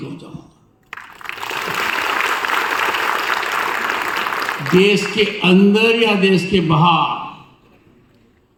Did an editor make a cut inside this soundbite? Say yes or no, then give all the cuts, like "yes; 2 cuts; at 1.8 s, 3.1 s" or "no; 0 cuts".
no; 0 cuts